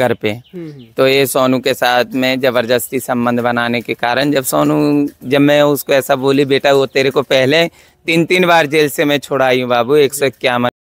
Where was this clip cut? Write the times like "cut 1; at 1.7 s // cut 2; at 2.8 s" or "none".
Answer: none